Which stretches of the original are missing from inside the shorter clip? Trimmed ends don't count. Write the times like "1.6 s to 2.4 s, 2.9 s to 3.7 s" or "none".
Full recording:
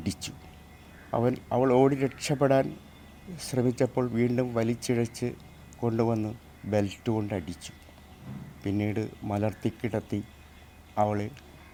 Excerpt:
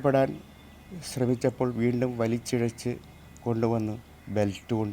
none